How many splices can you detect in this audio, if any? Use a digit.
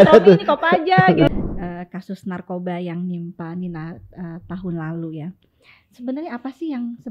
1